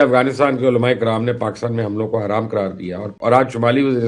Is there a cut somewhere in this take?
yes; 1 cut; at 3.1 s

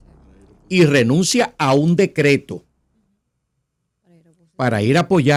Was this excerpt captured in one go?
yes; 0 cuts

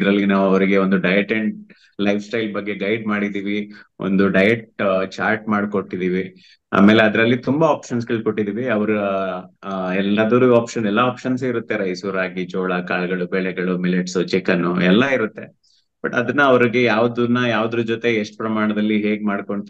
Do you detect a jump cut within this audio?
no; 0 cuts

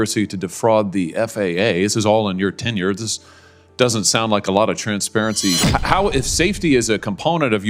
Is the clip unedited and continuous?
no; 1 cut; at 5.6 s

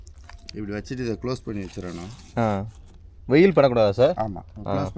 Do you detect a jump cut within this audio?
no; 0 cuts

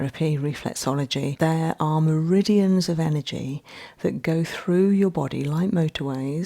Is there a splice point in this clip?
yes; 1 cut; at 1.3 s

